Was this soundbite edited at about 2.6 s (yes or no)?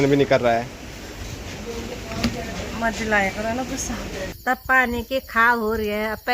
no